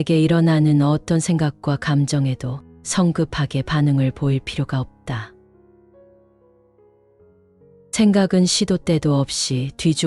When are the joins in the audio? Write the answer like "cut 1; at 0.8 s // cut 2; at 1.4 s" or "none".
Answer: cut 1; at 5.8 s // cut 2; at 7.5 s